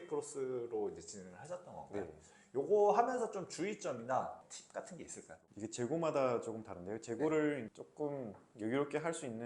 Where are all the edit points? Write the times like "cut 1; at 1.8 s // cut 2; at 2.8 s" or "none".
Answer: cut 1; at 4.4 s